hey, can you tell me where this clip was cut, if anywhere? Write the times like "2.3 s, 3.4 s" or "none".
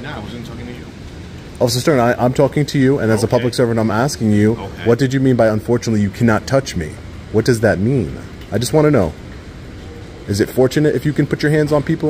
none